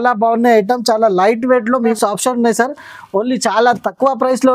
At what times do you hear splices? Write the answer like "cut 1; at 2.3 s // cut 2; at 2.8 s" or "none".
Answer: cut 1; at 2.0 s

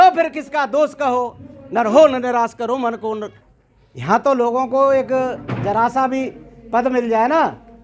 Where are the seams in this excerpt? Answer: cut 1; at 3.4 s

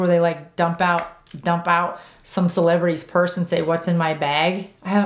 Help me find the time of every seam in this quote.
none

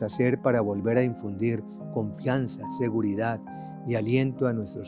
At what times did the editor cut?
none

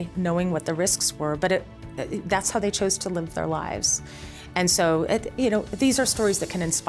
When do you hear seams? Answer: none

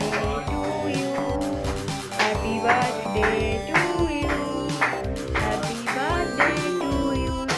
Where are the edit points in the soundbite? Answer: none

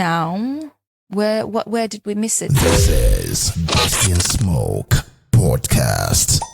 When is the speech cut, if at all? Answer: cut 1; at 2.5 s

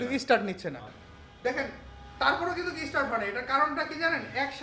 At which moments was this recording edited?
cut 1; at 0.9 s

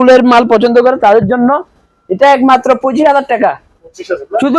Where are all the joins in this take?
none

